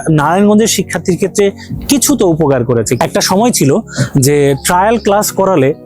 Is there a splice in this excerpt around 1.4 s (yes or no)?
no